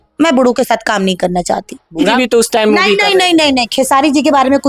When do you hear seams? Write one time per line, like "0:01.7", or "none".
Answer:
0:02.1